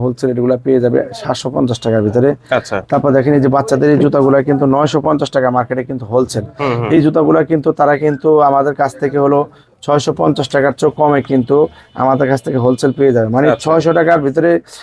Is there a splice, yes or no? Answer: no